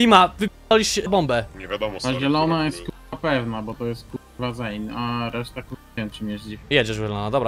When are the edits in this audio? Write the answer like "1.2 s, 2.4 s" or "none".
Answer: 1.5 s

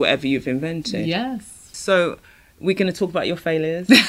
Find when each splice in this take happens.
1.7 s

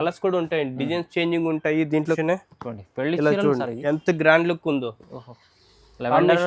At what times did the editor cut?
2.2 s

